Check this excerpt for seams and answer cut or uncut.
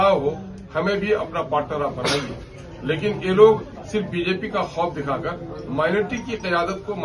uncut